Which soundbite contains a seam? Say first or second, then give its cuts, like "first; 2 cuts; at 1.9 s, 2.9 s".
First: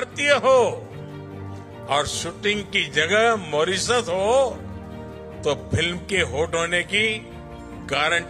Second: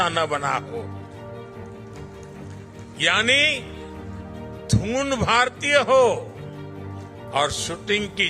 second; 2 cuts; at 1.3 s, 3.0 s